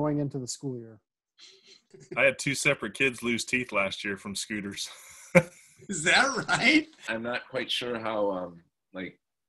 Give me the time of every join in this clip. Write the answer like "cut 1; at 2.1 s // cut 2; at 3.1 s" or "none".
cut 1; at 2.0 s // cut 2; at 7.0 s